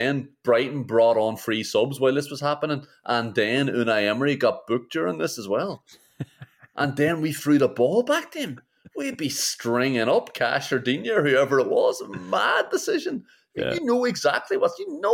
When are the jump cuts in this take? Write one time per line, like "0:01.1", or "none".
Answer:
none